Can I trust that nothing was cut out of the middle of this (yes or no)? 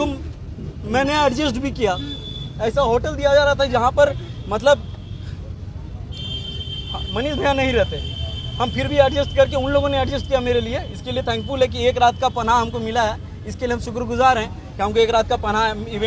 yes